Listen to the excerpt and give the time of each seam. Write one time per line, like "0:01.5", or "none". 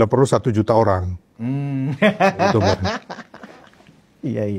0:03.0